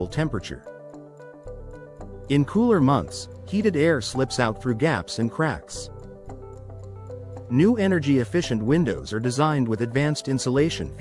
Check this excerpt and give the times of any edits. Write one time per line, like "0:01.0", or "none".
0:05.6
0:07.2